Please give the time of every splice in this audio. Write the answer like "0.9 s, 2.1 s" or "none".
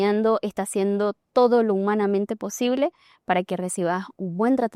none

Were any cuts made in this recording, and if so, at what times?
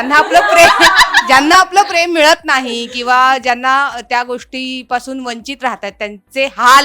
none

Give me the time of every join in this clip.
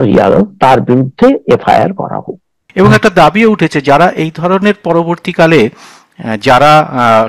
2.6 s

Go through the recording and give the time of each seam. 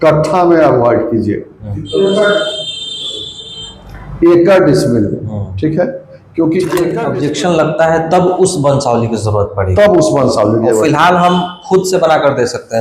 7.0 s

